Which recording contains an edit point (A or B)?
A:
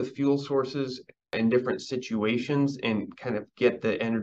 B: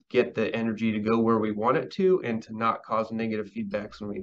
A